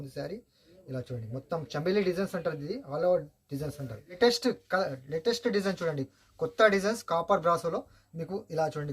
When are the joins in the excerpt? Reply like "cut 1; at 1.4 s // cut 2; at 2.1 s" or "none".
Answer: cut 1; at 4.2 s